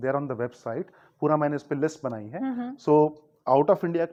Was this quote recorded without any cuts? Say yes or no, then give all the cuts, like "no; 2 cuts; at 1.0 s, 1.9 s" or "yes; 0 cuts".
yes; 0 cuts